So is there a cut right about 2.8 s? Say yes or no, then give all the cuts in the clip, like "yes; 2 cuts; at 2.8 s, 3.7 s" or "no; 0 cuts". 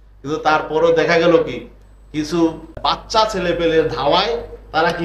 yes; 1 cut; at 2.8 s